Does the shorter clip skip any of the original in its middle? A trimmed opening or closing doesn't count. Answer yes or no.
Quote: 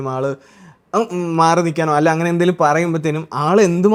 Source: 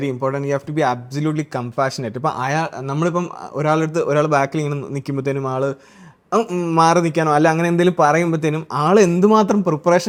no